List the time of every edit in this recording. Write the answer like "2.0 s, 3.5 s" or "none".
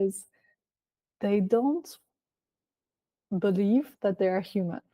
3.9 s